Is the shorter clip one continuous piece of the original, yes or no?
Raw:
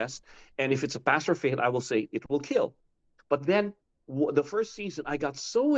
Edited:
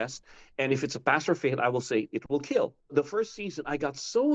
no